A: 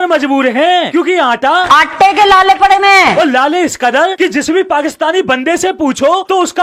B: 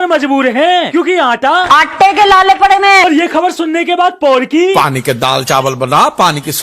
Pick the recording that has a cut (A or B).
B